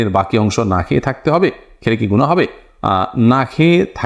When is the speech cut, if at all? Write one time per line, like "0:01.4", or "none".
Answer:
none